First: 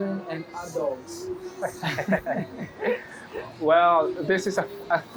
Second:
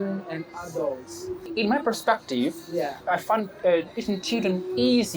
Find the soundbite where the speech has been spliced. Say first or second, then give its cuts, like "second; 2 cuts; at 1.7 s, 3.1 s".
second; 2 cuts; at 1.5 s, 3.0 s